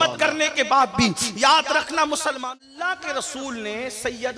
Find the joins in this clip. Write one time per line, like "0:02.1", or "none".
0:02.4

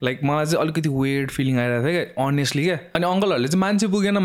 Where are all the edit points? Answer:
0:02.9

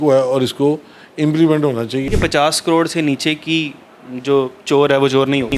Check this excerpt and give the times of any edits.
0:02.1

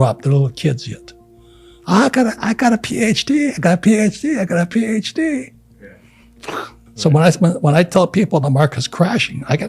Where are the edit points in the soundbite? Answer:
0:06.8

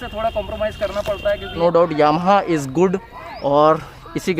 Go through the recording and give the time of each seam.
0:01.5

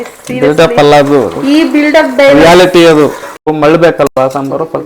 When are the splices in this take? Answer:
0:03.5

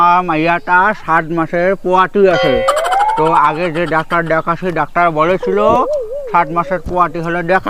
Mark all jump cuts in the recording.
none

